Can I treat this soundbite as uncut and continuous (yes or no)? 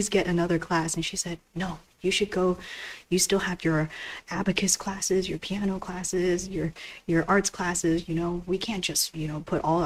yes